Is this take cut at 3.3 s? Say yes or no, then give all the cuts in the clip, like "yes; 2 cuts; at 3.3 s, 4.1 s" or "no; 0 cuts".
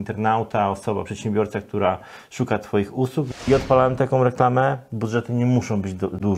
yes; 1 cut; at 3.3 s